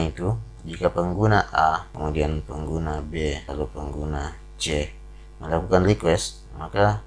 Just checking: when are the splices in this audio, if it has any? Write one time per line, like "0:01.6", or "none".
0:01.9
0:03.4